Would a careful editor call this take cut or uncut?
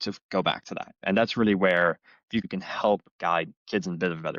cut